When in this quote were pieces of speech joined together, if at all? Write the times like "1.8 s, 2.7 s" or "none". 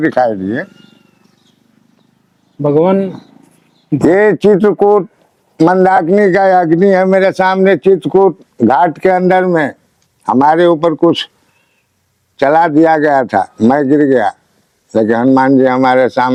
none